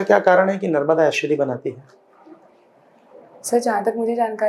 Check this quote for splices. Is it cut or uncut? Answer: uncut